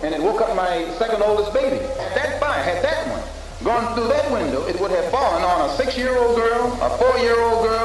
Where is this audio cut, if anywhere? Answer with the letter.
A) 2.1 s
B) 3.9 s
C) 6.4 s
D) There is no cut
A